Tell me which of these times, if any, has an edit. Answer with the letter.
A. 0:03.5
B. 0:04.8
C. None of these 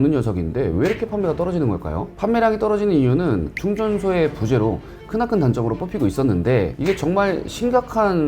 A